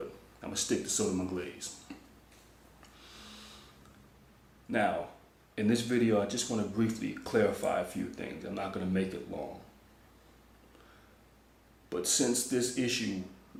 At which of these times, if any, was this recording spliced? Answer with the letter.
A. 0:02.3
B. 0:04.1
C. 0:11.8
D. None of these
D